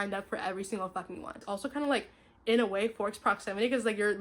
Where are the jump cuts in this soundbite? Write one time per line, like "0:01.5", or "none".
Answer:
0:01.4